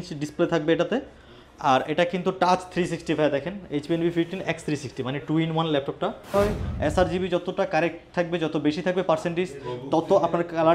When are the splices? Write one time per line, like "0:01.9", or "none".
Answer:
0:06.3

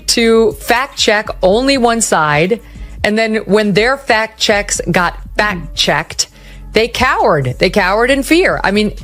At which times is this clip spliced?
none

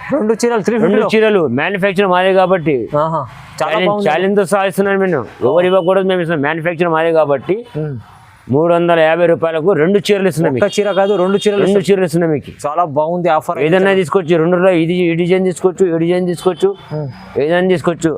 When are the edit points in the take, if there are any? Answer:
none

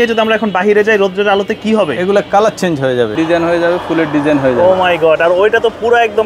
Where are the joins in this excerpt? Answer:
0:03.1

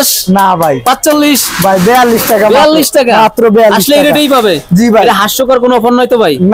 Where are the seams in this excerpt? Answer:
none

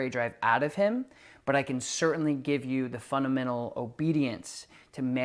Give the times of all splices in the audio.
none

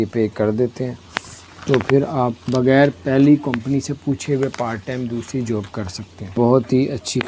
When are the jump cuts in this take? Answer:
0:06.4

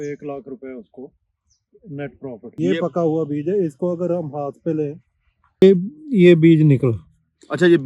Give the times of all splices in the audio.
0:02.5

